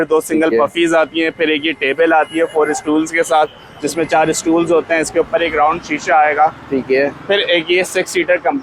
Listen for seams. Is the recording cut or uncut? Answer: uncut